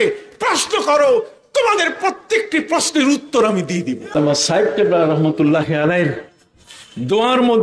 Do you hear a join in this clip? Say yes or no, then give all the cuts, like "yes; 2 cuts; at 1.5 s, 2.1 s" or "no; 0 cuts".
yes; 1 cut; at 4.2 s